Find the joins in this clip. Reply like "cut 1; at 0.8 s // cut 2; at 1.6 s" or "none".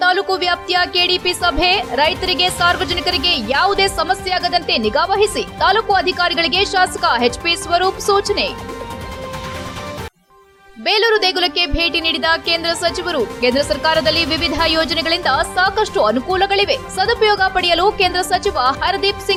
none